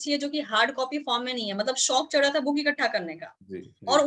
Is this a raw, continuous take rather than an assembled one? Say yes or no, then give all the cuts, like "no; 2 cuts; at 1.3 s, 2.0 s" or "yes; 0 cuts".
yes; 0 cuts